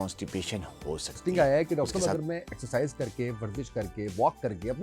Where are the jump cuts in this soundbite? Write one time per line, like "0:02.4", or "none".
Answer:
0:01.2

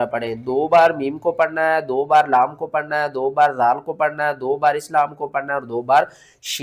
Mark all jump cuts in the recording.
none

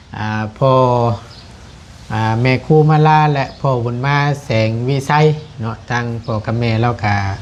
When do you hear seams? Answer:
none

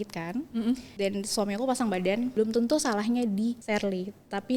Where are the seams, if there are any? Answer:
0:00.9
0:02.3
0:03.6

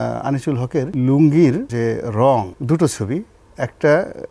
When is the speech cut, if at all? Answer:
0:00.9
0:01.7
0:02.6

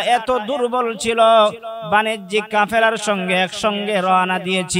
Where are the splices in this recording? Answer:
none

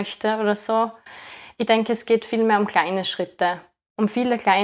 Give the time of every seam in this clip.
none

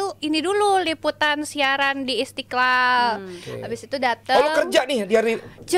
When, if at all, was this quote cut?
none

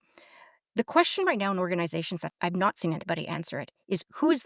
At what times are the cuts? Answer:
0:02.2

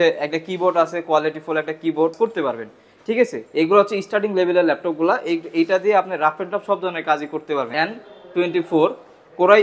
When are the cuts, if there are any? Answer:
0:02.1
0:07.7

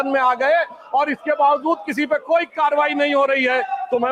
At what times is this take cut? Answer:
none

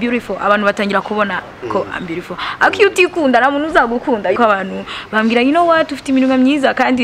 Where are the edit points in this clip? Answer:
0:04.3

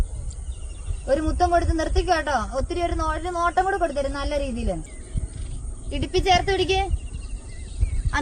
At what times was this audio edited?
0:04.9

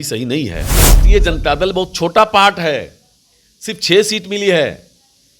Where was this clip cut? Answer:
0:01.0

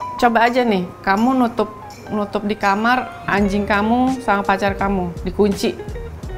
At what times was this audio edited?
0:00.9
0:05.2

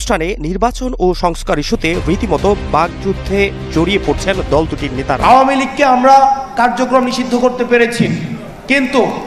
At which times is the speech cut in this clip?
0:05.2

